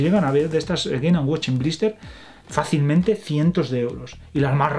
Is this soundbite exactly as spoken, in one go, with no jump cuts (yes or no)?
yes